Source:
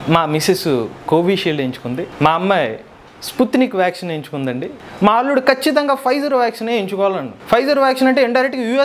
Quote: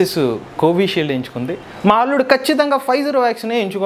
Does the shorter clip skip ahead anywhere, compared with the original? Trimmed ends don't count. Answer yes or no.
yes